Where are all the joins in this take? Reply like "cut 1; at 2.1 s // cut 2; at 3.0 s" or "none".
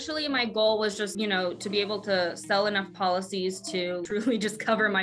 cut 1; at 1.1 s // cut 2; at 4.0 s